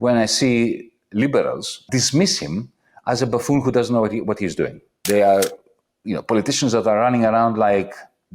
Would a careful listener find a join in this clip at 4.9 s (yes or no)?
yes